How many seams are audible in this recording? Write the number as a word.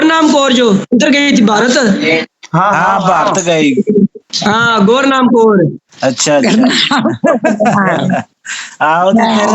two